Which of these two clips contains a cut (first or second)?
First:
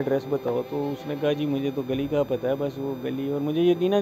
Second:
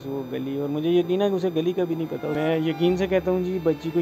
second